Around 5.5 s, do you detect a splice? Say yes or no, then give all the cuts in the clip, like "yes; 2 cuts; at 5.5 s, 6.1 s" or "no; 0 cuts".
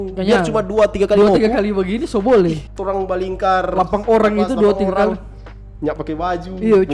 no; 1 cut; at 2.7 s